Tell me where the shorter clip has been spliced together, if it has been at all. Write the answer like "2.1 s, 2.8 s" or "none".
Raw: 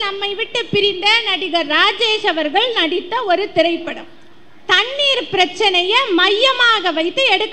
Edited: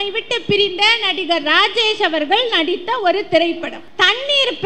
3.8 s